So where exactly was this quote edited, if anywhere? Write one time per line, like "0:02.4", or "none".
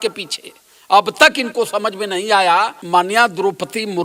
0:02.8